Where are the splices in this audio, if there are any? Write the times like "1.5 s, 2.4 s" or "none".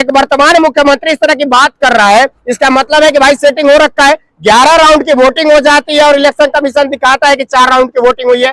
none